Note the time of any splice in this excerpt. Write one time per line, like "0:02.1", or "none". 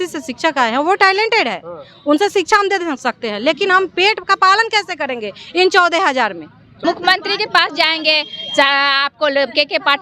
0:06.6